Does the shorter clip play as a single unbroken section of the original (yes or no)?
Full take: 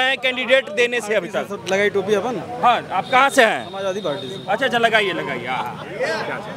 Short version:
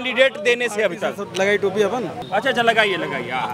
no